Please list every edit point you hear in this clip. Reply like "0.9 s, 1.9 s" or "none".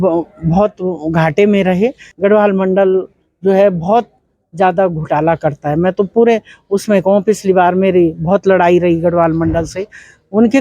2.1 s